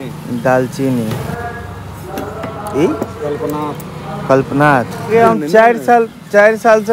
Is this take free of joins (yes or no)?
no